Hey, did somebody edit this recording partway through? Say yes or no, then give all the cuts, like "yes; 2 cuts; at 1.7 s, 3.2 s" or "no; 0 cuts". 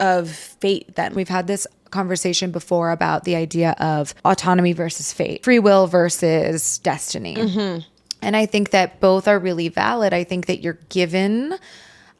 yes; 3 cuts; at 1.1 s, 4.1 s, 5.4 s